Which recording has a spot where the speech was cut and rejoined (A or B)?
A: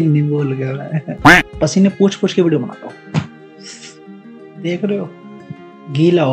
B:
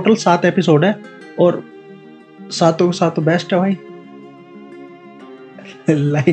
A